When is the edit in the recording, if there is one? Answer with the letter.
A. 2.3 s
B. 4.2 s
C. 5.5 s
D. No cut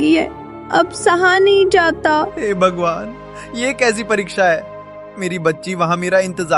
A